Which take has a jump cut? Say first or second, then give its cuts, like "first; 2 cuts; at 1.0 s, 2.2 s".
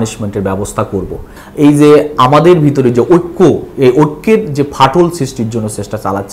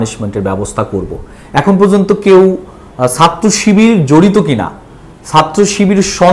first; 1 cut; at 1.4 s